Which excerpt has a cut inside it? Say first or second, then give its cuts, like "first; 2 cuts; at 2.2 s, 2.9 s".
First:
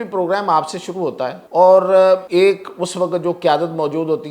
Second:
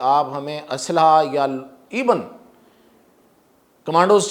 first; 2 cuts; at 1.4 s, 2.2 s